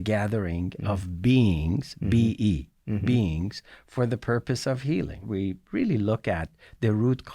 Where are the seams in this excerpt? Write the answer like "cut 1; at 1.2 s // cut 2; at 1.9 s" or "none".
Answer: cut 1; at 5.2 s